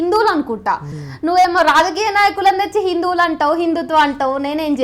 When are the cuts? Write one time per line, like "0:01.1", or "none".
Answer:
0:00.9